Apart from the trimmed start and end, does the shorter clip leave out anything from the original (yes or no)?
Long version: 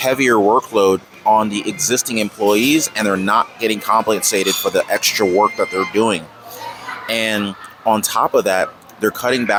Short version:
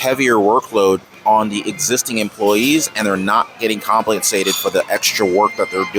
no